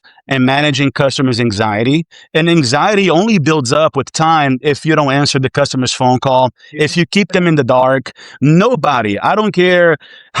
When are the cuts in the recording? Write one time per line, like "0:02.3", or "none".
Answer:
none